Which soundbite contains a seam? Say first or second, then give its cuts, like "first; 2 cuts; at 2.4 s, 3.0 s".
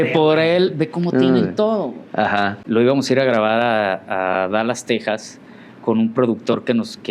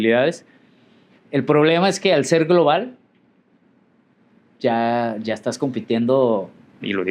first; 1 cut; at 2.6 s